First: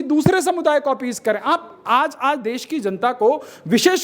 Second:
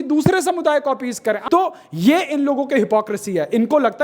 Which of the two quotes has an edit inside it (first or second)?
second